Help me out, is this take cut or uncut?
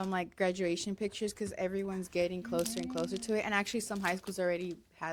uncut